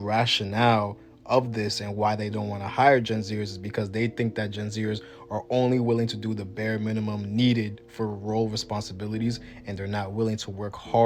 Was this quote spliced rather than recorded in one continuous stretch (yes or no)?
no